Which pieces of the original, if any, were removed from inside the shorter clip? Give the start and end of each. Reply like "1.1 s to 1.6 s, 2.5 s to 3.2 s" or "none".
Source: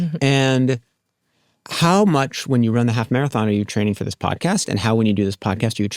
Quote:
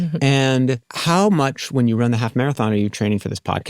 0.9 s to 1.7 s